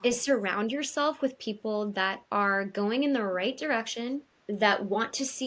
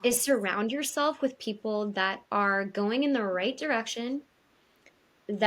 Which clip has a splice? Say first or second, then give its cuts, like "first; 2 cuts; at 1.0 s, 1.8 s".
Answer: first; 1 cut; at 4.3 s